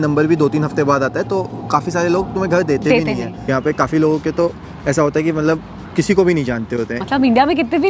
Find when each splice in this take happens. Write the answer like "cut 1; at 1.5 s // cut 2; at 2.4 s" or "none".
cut 1; at 3.5 s // cut 2; at 7.0 s